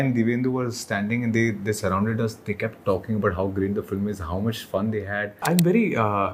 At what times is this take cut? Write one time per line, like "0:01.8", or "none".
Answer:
0:05.4